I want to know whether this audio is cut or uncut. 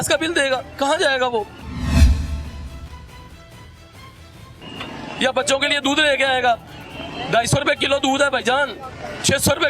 uncut